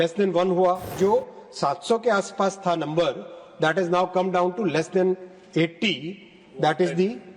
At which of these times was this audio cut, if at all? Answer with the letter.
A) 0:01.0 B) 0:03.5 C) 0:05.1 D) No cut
A